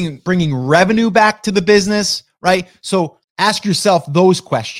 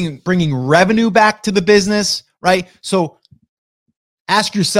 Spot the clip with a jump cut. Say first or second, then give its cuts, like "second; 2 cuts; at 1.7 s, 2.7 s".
first; 1 cut; at 3.2 s